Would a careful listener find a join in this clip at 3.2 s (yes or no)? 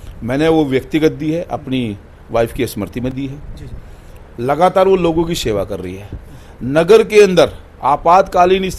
no